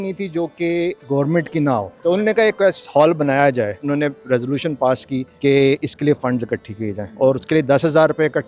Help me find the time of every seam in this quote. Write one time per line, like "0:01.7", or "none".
0:01.9
0:03.8
0:05.3
0:07.0